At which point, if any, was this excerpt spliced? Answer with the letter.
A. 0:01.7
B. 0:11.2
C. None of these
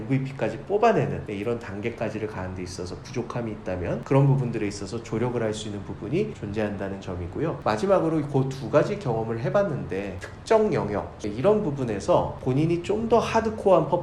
B